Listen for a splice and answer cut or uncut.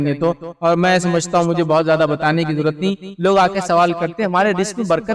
uncut